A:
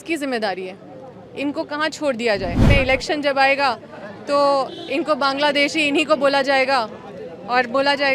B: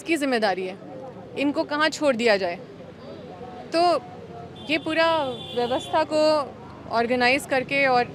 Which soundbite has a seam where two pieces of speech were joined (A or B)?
A